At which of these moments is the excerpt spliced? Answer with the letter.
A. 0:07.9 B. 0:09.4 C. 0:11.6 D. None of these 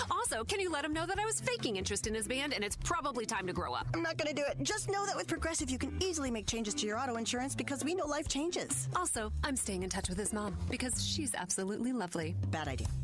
D